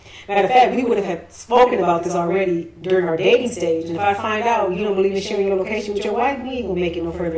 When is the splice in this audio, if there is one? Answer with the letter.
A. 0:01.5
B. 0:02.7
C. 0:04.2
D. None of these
D